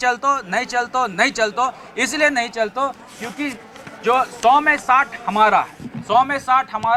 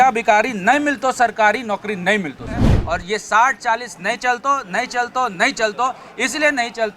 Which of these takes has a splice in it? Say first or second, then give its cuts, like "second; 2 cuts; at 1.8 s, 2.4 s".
second; 1 cut; at 2.7 s